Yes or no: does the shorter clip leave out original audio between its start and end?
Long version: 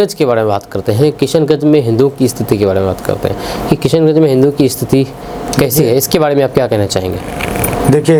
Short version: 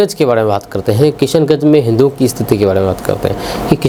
no